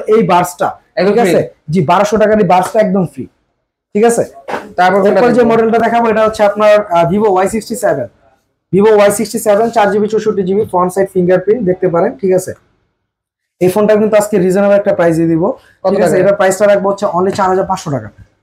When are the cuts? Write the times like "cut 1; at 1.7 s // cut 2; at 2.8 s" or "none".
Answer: none